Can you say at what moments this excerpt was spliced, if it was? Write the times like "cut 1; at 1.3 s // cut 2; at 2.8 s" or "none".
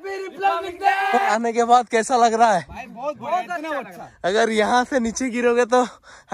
cut 1; at 1.3 s